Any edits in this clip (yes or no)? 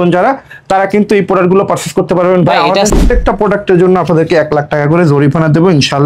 yes